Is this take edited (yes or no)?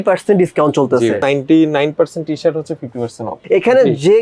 yes